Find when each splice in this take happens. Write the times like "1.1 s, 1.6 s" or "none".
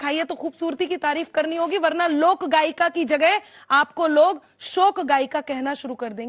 none